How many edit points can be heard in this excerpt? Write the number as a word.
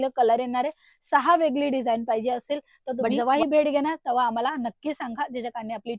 one